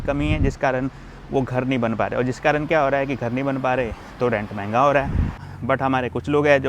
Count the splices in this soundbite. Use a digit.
1